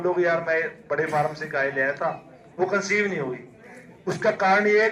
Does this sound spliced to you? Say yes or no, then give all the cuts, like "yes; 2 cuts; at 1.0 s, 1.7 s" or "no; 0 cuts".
no; 0 cuts